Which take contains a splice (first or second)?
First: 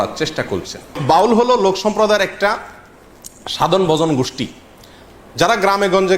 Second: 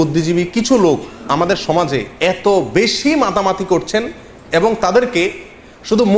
first